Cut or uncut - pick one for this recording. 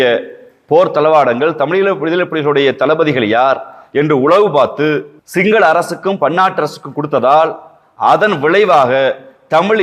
cut